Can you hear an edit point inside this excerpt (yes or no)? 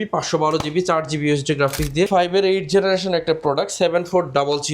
yes